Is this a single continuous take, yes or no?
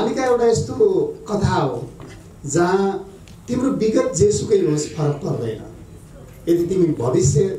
yes